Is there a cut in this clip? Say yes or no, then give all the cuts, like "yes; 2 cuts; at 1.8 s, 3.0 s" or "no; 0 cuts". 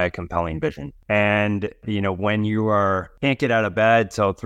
yes; 3 cuts; at 0.9 s, 1.8 s, 3.1 s